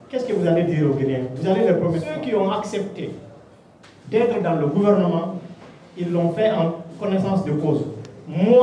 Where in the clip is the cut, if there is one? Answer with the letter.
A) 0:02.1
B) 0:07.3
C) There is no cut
A